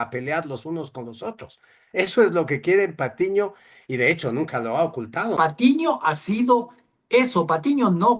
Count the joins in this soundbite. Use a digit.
1